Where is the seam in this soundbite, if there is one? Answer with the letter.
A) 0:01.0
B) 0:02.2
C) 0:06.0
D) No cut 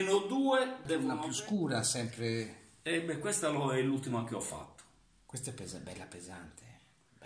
A